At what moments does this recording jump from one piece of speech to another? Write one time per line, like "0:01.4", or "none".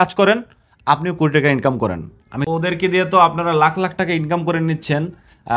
0:02.4